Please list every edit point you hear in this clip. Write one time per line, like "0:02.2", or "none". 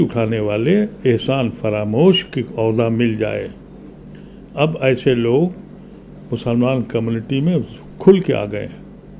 none